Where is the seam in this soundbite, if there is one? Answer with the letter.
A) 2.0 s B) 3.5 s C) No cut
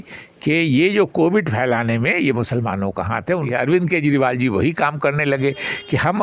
B